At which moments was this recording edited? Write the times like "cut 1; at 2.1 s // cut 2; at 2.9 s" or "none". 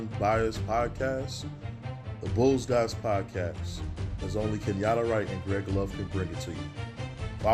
none